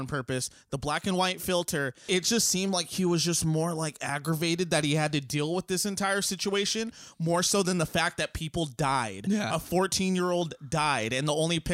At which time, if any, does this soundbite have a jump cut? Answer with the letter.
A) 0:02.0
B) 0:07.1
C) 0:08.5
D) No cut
A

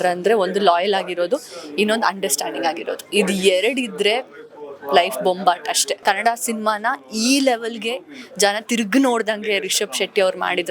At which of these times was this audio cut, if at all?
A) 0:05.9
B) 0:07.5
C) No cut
A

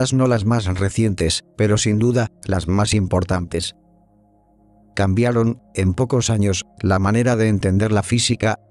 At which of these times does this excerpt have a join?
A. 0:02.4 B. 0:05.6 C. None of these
C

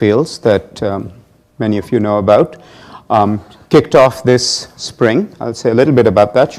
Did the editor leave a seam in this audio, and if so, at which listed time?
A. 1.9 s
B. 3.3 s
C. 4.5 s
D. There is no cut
C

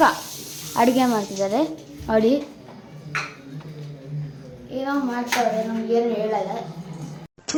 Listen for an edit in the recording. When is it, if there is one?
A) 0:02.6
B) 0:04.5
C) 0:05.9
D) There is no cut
D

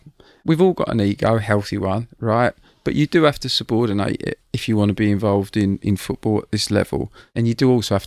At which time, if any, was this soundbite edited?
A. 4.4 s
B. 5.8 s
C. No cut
B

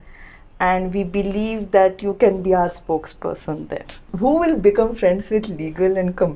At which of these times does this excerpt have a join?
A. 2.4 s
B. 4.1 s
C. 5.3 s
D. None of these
B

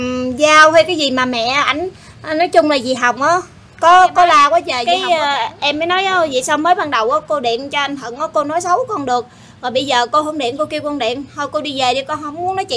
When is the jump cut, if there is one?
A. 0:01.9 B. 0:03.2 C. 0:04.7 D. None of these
C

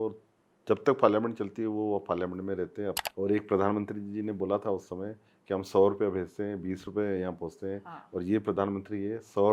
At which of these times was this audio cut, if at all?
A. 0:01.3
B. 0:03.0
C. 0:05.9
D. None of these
B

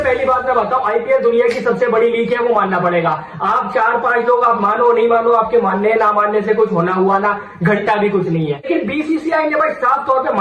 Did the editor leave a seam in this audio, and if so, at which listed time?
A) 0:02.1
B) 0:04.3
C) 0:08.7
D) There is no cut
C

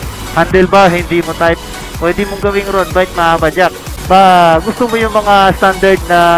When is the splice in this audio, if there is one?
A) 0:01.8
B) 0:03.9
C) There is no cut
B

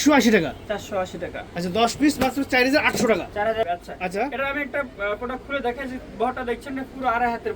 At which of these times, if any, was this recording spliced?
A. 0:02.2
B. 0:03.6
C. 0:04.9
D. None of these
B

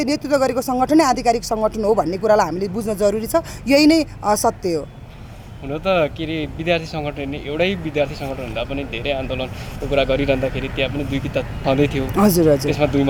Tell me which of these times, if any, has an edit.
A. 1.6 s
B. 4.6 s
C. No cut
C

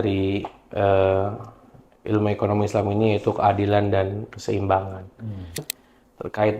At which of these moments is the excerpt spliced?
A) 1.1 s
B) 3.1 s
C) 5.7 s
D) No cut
C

